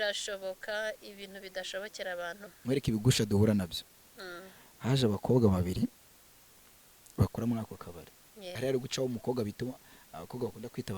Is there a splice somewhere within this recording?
yes; 2 cuts; at 2.5 s, 8.6 s

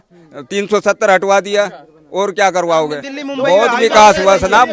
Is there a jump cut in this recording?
yes; 1 cut; at 3.0 s

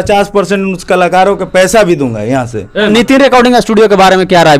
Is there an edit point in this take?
yes; 1 cut; at 2.9 s

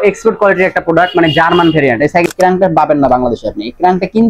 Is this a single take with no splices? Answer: no; 1 cut; at 2.2 s

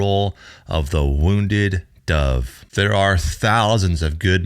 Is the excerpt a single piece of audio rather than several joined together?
no; 1 cut; at 2.6 s

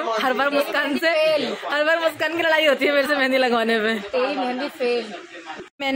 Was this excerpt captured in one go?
yes; 0 cuts

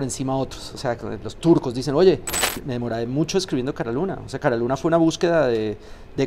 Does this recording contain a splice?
yes; 1 cut; at 2.5 s

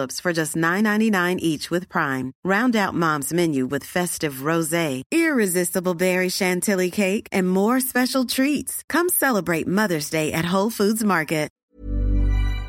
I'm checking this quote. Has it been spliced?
yes; 1 cut; at 11.5 s

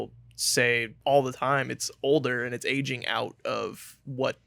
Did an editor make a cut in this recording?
yes; 1 cut; at 0.9 s

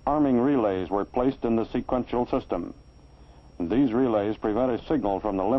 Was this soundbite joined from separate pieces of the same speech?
no; 0 cuts

